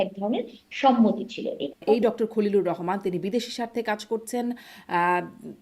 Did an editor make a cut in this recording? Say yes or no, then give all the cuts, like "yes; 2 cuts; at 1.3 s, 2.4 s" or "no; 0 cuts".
yes; 1 cut; at 1.8 s